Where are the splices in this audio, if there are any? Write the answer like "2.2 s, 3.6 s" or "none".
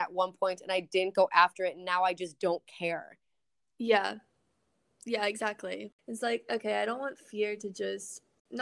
5.9 s